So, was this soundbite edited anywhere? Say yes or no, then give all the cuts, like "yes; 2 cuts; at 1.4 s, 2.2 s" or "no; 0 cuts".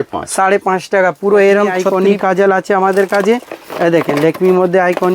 yes; 1 cut; at 1.8 s